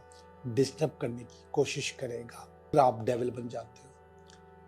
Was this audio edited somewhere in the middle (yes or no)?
yes